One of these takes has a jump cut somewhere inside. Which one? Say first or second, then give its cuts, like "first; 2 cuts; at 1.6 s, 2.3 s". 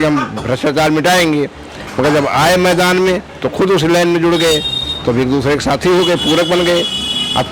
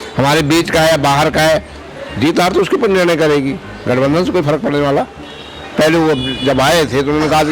second; 1 cut; at 5.3 s